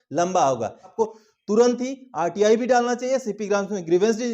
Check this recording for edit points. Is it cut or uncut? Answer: cut